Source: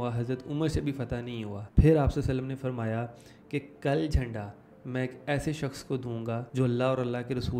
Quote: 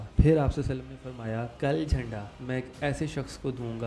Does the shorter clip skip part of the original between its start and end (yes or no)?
yes